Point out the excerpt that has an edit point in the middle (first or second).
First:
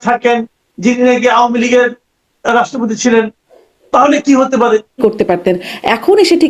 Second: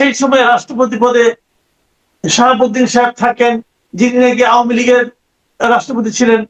first